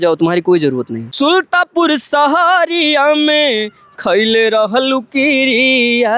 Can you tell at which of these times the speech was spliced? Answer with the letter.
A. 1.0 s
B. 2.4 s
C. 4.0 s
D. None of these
A